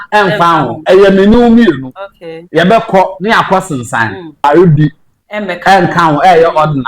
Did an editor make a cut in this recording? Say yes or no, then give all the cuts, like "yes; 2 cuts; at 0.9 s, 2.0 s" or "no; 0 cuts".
yes; 1 cut; at 4.4 s